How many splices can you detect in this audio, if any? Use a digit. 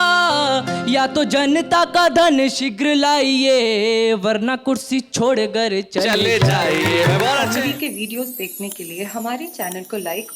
1